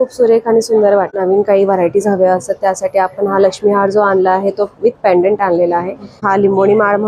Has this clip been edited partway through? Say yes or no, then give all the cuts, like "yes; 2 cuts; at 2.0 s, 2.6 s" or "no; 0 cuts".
yes; 2 cuts; at 1.1 s, 6.2 s